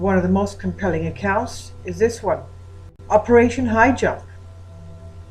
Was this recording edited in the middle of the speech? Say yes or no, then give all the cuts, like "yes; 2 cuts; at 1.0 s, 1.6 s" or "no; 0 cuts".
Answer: yes; 1 cut; at 3.8 s